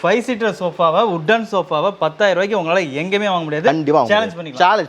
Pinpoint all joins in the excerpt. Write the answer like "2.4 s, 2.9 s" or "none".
none